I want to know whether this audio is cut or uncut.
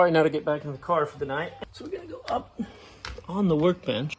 cut